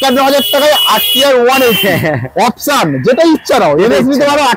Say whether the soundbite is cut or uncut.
uncut